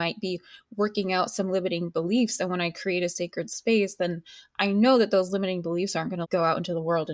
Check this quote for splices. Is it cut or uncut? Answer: cut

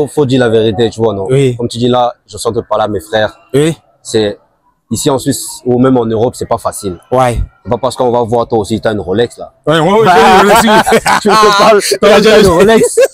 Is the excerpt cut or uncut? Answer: uncut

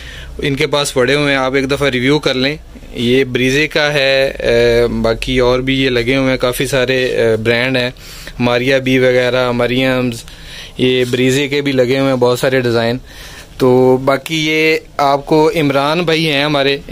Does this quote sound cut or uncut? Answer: uncut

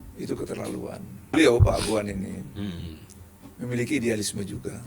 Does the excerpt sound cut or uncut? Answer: cut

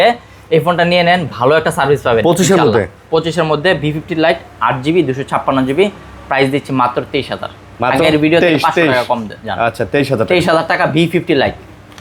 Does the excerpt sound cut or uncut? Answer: uncut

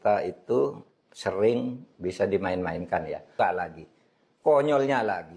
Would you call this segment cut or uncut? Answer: cut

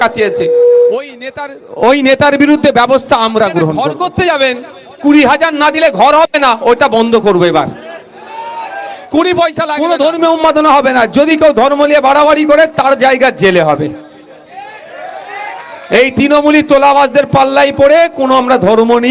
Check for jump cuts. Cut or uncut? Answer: cut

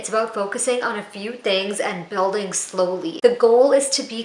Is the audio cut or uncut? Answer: cut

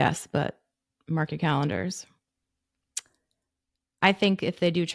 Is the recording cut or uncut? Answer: uncut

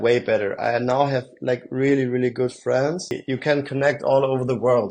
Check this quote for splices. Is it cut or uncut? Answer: cut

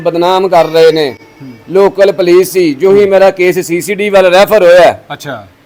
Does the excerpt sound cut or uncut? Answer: uncut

